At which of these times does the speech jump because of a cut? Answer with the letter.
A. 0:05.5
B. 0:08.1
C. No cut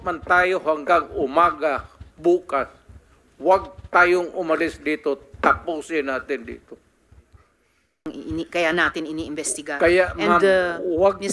B